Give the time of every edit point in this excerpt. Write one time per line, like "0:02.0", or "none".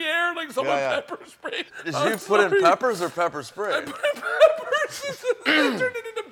0:01.7

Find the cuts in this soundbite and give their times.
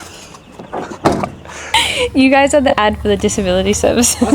0:01.6

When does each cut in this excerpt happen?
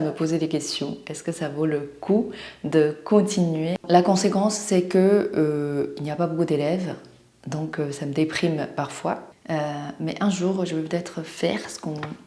0:03.8
0:09.3

